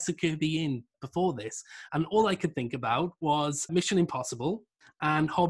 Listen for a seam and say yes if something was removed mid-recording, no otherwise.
yes